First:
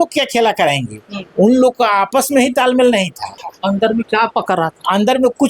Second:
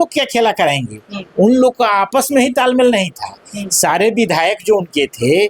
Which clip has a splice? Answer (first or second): first